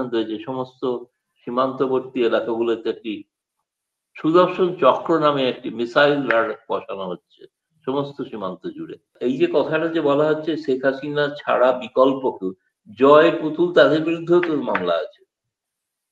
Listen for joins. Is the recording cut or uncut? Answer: cut